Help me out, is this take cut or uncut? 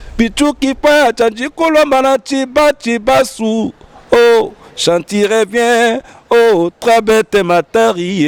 uncut